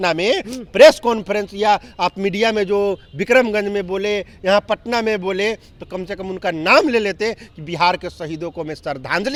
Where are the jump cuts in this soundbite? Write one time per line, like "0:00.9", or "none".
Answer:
none